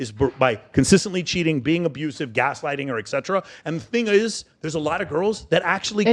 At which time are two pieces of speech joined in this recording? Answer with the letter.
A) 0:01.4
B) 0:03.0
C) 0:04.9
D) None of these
D